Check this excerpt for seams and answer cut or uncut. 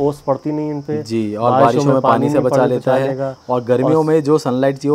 uncut